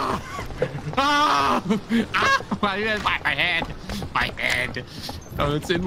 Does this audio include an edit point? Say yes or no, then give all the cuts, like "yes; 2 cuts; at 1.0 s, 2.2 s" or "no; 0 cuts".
no; 0 cuts